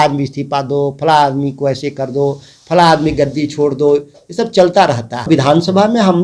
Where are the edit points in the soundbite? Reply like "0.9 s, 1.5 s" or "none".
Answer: 5.3 s